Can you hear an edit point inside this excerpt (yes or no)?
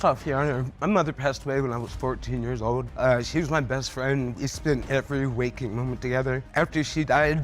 yes